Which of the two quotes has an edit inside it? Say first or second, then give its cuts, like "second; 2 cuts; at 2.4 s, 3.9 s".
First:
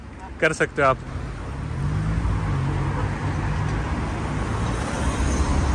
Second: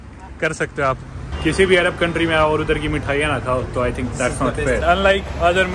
second; 2 cuts; at 1.3 s, 4.8 s